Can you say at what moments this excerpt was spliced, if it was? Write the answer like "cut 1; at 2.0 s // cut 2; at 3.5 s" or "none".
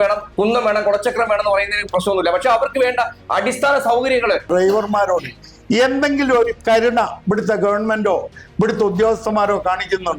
cut 1; at 4.5 s